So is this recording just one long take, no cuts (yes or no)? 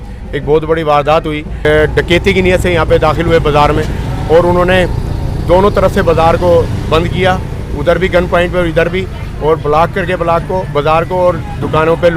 no